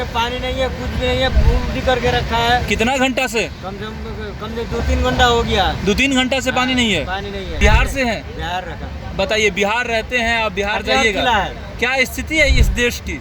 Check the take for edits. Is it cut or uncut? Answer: cut